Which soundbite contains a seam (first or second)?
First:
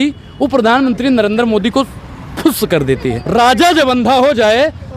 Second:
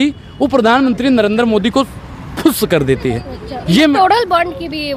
first